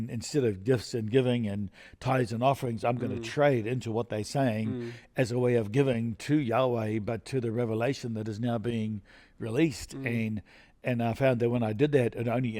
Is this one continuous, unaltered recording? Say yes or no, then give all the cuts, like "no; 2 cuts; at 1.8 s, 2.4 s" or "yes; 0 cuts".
yes; 0 cuts